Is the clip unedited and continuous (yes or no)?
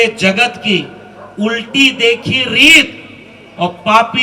yes